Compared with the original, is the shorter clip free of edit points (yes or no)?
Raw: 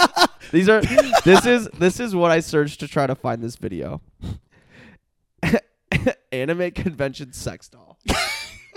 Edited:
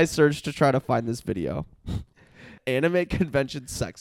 no